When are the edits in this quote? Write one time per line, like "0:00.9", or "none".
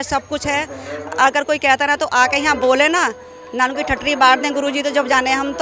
none